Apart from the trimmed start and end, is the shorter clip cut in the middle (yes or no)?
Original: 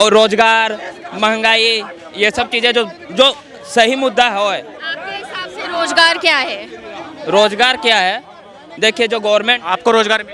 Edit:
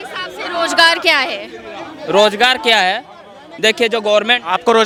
no